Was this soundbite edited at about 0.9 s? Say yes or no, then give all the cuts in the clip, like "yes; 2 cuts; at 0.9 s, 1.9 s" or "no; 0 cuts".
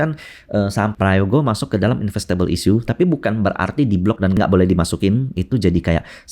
yes; 2 cuts; at 0.9 s, 4.3 s